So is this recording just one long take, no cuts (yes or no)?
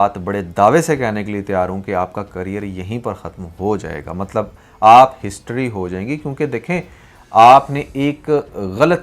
yes